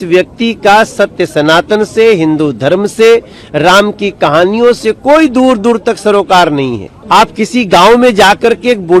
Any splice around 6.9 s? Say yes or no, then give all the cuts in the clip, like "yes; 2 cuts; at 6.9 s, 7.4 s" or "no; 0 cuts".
yes; 1 cut; at 6.9 s